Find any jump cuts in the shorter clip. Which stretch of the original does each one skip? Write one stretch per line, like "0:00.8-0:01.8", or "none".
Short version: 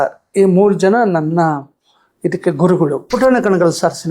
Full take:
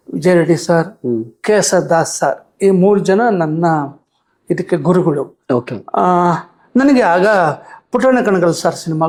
0:05.3-0:07.9